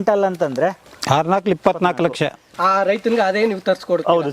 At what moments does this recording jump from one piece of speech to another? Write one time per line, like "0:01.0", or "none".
0:00.9
0:02.4

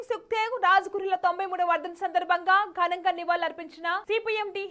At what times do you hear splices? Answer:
none

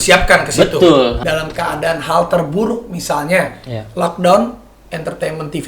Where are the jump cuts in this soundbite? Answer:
0:01.2

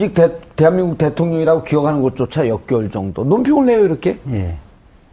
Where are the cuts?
none

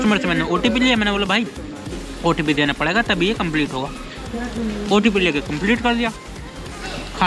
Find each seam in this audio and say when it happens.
none

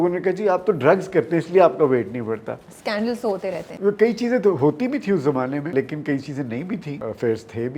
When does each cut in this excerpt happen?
0:03.1
0:05.7
0:06.9

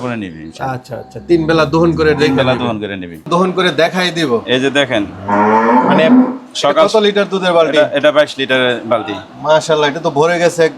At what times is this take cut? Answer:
0:03.2

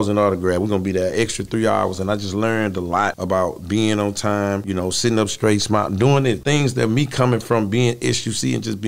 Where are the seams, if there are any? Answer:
0:03.2
0:04.6
0:06.4

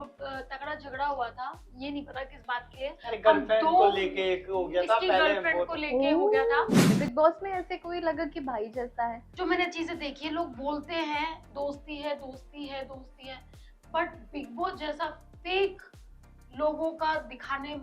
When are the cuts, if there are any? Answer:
0:06.9
0:09.3

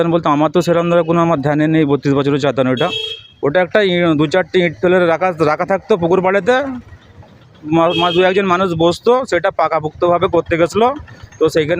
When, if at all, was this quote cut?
none

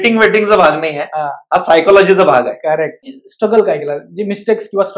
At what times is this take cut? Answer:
0:03.2

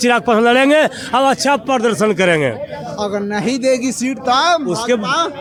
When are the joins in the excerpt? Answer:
none

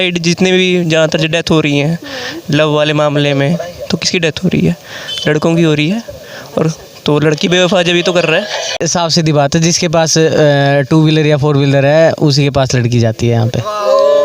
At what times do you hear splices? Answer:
0:08.8

